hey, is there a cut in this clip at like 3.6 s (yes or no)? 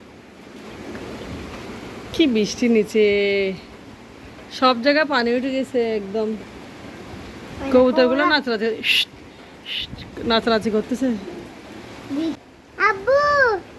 no